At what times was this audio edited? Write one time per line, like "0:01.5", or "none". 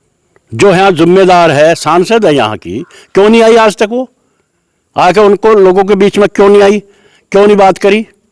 none